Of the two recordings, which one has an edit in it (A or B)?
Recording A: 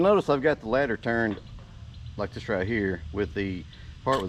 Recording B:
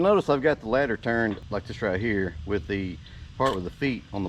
B